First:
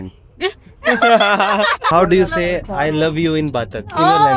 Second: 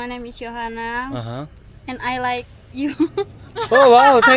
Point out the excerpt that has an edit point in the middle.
first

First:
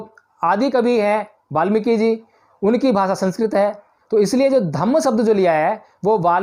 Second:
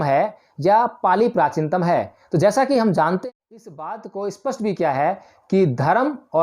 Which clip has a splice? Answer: second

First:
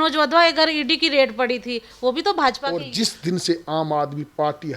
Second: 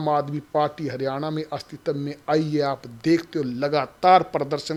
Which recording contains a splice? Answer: first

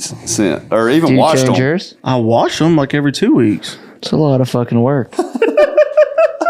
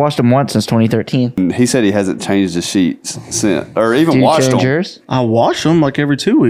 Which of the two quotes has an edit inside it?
second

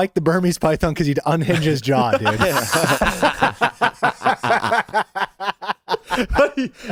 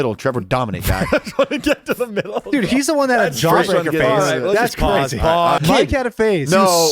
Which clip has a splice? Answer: second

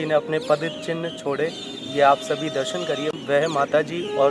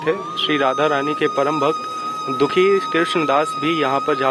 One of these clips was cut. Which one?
first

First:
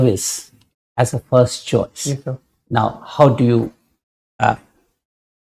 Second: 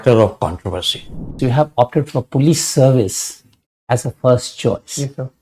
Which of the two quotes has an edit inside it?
second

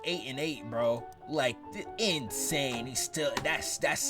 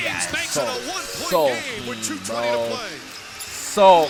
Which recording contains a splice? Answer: first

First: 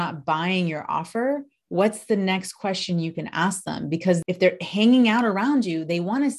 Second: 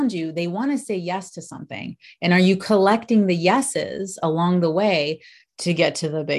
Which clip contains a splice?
first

